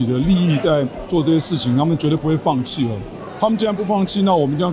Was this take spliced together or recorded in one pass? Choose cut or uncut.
uncut